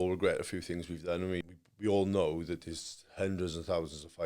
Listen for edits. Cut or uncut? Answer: cut